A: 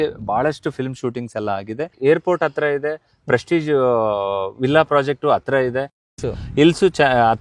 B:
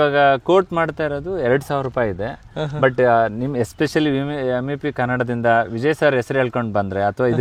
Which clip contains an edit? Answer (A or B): A